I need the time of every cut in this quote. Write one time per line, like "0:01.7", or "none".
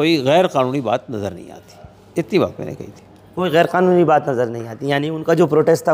none